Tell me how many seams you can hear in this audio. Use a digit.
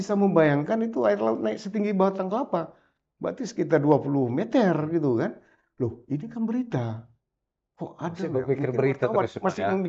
0